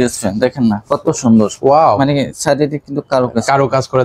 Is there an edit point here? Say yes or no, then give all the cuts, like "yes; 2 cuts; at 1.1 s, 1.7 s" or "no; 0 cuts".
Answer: no; 0 cuts